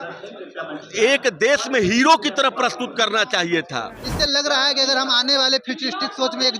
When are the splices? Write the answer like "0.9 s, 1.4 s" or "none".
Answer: 4.0 s